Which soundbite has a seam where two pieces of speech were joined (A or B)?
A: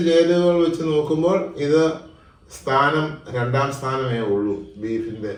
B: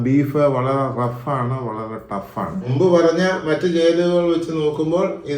B